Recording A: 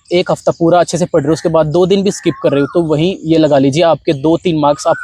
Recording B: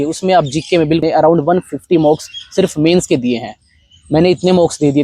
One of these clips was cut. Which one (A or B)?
B